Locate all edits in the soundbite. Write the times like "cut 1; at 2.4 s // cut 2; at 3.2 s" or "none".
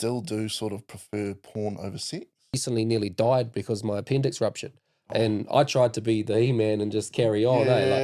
cut 1; at 2.6 s